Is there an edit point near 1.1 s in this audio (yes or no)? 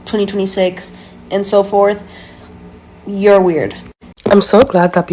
no